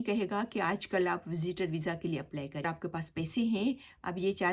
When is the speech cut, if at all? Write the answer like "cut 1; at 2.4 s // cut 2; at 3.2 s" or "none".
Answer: cut 1; at 2.6 s